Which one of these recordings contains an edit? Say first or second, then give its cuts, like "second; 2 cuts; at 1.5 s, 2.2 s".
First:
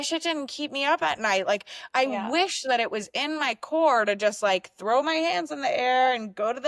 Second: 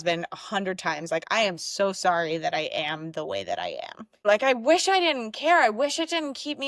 second; 1 cut; at 4.2 s